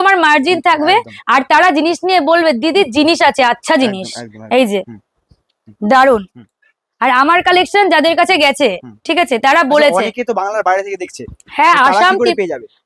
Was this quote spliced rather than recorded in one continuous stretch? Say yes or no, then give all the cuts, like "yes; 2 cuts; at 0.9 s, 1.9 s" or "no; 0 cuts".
no; 0 cuts